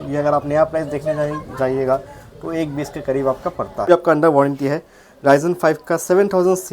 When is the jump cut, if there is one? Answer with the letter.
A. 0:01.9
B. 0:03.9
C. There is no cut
B